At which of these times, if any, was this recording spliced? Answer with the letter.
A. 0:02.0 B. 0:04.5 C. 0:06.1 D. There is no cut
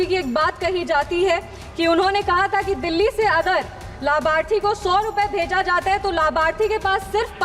D